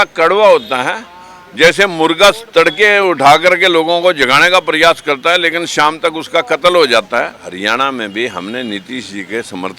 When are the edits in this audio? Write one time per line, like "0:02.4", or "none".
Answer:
0:07.6